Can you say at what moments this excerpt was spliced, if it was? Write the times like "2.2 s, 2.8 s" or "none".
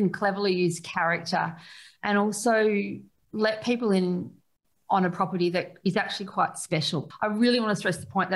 7.1 s